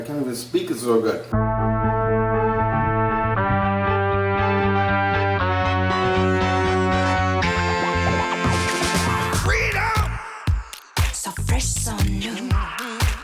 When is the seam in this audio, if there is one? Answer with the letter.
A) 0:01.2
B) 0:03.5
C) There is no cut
A